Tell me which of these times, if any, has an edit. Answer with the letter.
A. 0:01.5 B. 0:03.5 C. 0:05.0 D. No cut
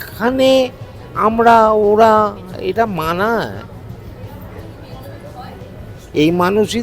D